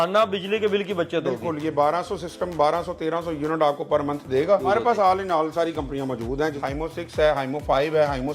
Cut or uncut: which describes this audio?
cut